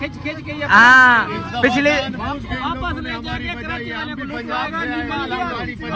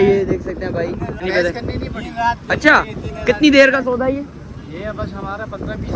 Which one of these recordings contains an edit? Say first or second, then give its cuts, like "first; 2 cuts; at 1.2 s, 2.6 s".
second; 1 cut; at 1.2 s